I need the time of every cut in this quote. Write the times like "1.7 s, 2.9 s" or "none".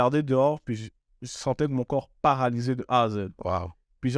none